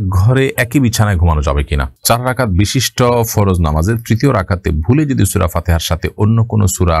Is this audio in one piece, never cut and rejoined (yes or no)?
no